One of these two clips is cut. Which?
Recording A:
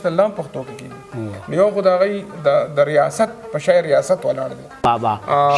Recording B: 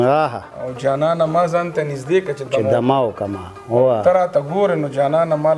A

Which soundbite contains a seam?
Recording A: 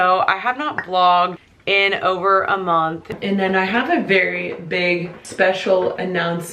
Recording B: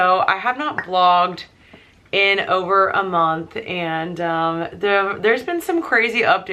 A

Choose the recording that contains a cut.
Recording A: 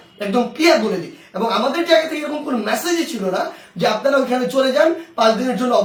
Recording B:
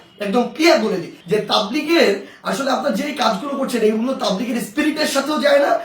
B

